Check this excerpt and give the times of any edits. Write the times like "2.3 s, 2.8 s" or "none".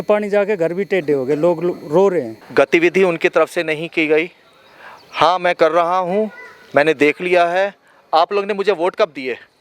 2.4 s